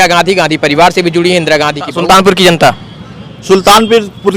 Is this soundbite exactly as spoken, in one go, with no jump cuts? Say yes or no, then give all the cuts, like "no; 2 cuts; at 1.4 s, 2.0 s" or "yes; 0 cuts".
no; 1 cut; at 1.9 s